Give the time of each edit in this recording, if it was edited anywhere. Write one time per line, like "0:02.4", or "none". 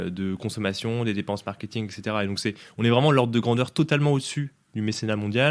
none